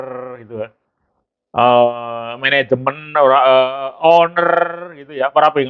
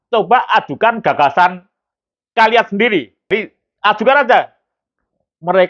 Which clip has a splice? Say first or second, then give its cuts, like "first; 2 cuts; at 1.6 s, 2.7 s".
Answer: second; 1 cut; at 3.3 s